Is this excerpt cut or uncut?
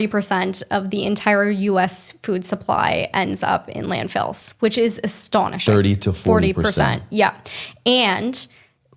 uncut